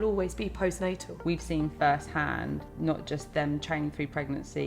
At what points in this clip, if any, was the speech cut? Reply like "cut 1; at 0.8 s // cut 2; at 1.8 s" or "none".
cut 1; at 1.1 s // cut 2; at 2.7 s